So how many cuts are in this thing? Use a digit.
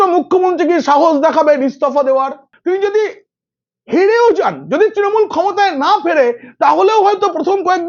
1